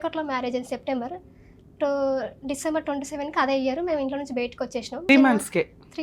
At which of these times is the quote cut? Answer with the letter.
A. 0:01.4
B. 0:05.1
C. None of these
B